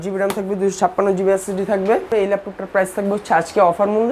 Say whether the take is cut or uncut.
cut